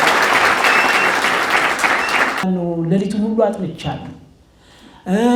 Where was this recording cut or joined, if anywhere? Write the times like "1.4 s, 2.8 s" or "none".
2.4 s